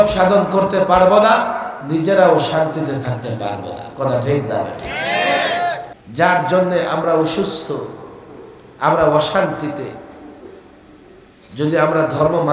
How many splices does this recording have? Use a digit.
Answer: 1